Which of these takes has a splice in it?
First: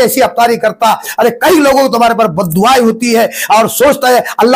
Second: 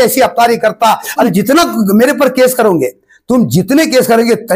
second; 1 cut; at 1.3 s

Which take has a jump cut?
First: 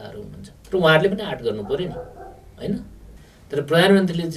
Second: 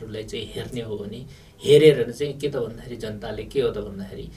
first; 1 cut; at 3.1 s

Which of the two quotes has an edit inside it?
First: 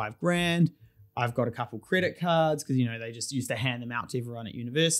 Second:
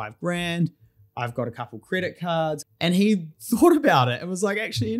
second; 1 cut; at 2.6 s

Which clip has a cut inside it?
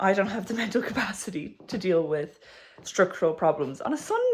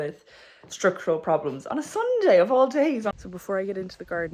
second; 1 cut; at 3.1 s

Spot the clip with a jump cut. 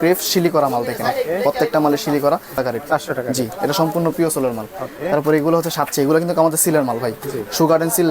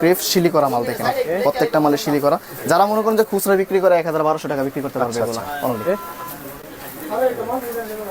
first; 1 cut; at 2.5 s

